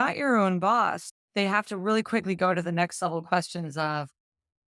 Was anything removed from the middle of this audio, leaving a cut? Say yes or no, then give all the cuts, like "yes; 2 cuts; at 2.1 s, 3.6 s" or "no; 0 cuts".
yes; 1 cut; at 1.1 s